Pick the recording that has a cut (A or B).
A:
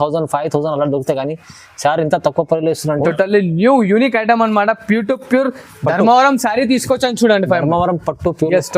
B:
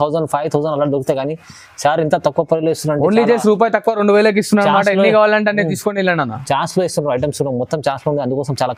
A